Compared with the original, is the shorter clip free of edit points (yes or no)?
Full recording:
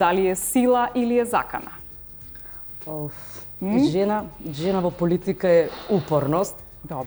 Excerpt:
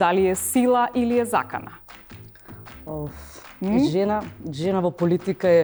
yes